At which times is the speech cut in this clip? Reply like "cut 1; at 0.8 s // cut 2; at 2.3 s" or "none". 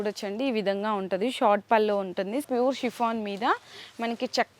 cut 1; at 2.4 s